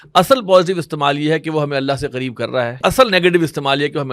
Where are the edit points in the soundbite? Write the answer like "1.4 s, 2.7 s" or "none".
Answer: 2.8 s